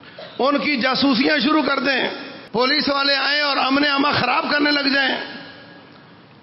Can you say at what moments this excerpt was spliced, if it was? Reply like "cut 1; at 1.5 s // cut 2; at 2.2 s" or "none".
cut 1; at 2.3 s